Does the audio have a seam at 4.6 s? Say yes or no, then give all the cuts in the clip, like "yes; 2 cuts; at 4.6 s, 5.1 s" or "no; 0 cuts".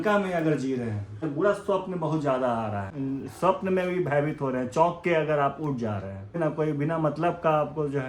no; 3 cuts; at 1.2 s, 2.9 s, 6.4 s